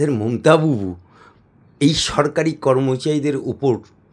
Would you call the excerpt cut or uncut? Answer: uncut